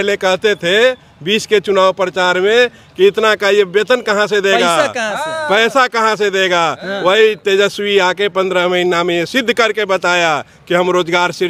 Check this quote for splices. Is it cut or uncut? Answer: uncut